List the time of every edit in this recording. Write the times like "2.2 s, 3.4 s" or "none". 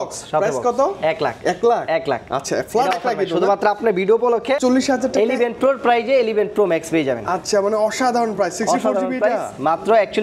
4.6 s

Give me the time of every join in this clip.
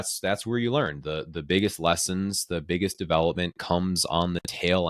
none

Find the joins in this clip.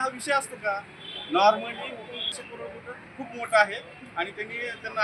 2.5 s

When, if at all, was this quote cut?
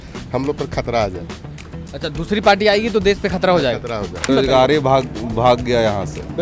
4.3 s

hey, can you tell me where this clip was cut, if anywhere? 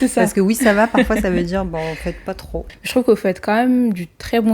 2.7 s

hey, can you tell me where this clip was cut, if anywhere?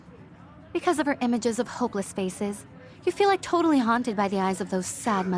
4.4 s

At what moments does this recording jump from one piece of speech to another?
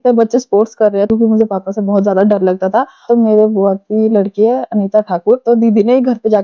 1.1 s, 3.0 s, 5.4 s

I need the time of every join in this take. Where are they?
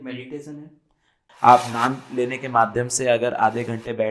1.2 s

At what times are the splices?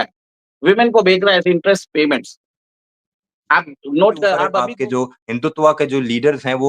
4.6 s

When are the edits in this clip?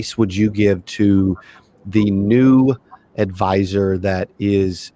none

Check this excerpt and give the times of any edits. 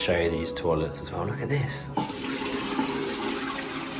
1.8 s

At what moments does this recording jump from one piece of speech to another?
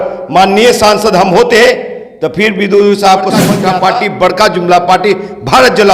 3.5 s

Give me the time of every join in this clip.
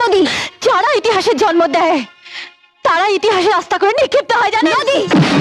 none

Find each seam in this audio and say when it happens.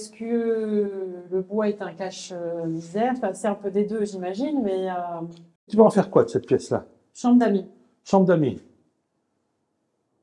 5.7 s

